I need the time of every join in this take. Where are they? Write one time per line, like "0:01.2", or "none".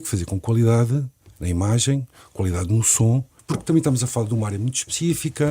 0:03.4